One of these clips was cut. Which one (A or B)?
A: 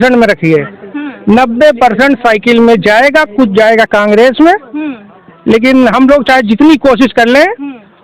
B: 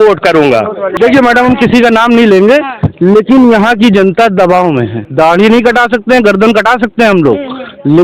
B